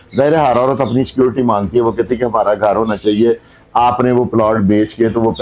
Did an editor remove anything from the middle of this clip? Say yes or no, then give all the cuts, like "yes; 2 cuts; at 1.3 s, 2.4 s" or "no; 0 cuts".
no; 0 cuts